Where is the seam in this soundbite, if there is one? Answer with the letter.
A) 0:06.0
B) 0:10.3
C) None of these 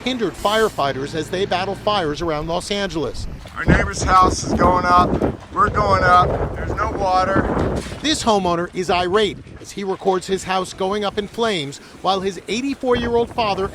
A